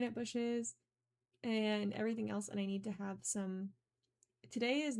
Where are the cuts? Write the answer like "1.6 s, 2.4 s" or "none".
3.2 s

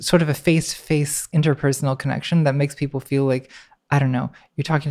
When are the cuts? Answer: 1.3 s

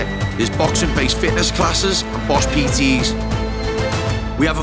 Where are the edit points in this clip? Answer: none

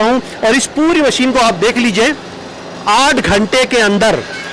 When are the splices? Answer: none

